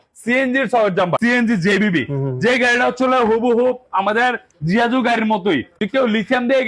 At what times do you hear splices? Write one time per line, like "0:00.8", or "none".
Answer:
0:01.2
0:05.7